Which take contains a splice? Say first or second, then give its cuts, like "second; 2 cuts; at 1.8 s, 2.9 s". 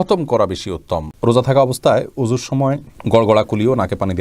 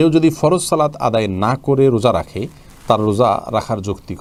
first; 2 cuts; at 1.1 s, 2.9 s